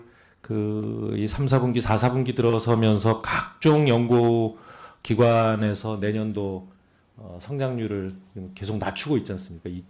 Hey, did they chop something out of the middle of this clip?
yes; 1 cut; at 8.5 s

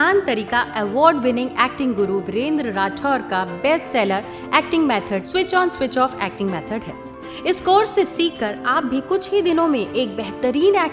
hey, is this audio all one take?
yes; 0 cuts

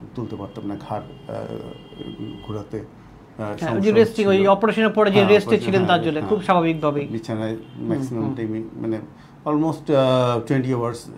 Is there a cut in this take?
no; 0 cuts

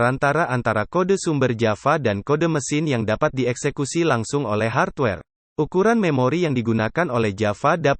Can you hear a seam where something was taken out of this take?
yes; 1 cut; at 5.3 s

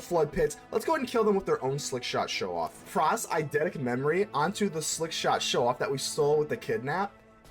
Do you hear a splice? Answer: yes; 1 cut; at 2.9 s

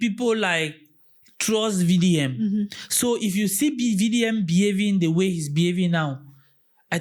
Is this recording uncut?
yes; 0 cuts

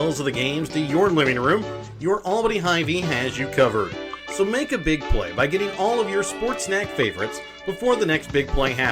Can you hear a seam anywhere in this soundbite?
no; 0 cuts

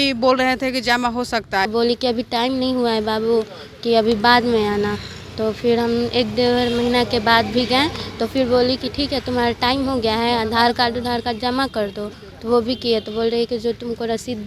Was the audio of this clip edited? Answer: yes; 1 cut; at 1.7 s

